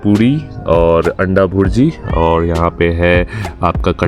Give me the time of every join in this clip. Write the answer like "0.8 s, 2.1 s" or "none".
none